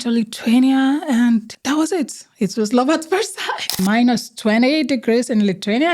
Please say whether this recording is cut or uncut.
cut